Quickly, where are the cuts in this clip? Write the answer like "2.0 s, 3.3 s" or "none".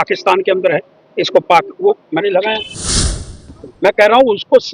3.2 s